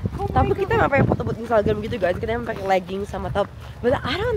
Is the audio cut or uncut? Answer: uncut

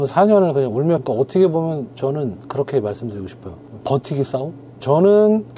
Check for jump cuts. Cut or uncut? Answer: cut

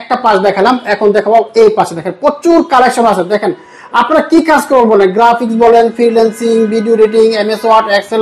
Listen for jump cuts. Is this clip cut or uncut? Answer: uncut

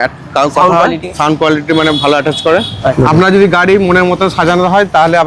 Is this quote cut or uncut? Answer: uncut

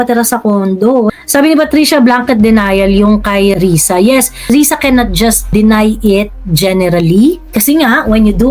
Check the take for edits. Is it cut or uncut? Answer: cut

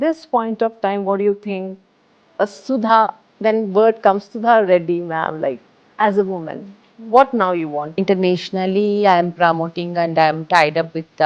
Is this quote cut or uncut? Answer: cut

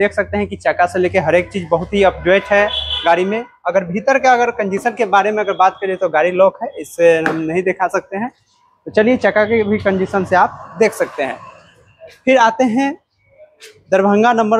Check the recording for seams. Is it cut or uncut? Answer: uncut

